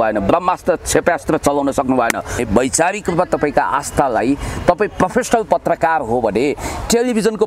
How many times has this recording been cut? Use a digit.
1